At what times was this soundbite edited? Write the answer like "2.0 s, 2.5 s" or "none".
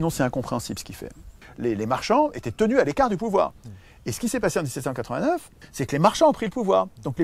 1.4 s, 5.6 s